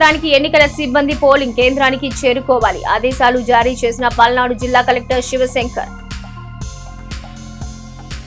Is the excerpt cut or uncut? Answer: uncut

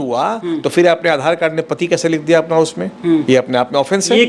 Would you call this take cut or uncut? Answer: uncut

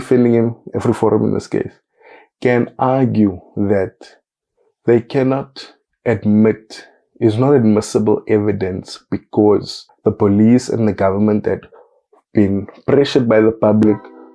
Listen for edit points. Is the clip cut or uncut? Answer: cut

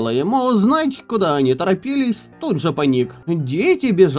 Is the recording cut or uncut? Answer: cut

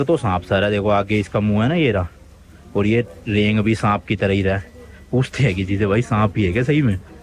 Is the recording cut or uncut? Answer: uncut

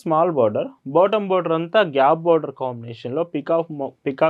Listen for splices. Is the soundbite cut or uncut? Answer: uncut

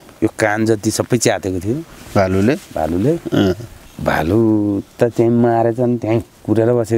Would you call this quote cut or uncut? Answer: cut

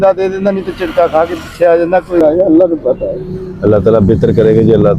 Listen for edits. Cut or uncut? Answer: cut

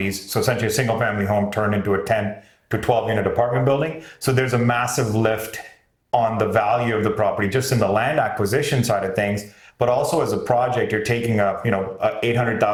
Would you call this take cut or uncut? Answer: uncut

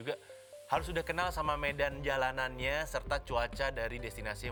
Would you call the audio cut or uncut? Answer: uncut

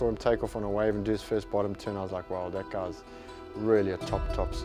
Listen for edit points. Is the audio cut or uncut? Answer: uncut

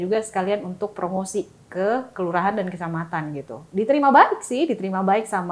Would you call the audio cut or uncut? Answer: cut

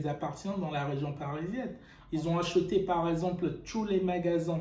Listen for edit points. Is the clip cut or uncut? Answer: cut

